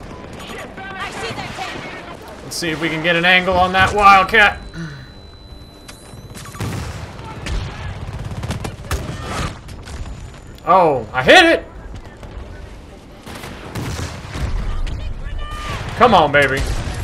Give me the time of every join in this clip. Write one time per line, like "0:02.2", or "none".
0:02.1